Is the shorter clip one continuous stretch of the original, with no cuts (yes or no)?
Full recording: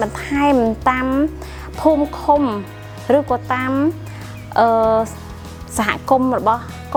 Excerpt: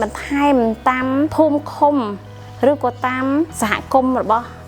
no